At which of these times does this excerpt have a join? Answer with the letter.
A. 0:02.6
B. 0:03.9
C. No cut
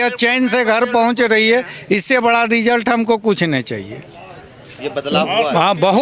C